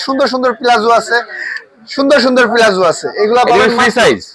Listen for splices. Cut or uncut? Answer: uncut